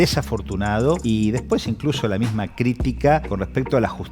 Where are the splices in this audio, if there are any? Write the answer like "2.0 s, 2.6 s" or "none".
1.0 s, 3.3 s